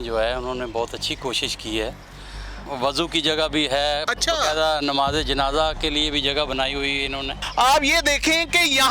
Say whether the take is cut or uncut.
cut